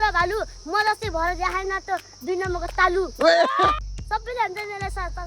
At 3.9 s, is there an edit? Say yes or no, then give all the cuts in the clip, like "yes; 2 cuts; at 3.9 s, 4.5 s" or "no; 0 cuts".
yes; 1 cut; at 3.9 s